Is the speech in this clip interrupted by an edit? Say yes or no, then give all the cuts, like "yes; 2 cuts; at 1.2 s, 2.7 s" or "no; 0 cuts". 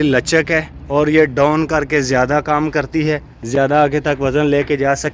no; 0 cuts